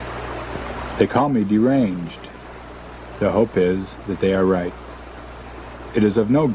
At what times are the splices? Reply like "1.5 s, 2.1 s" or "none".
4.8 s